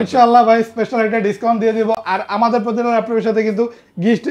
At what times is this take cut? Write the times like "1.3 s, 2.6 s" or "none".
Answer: none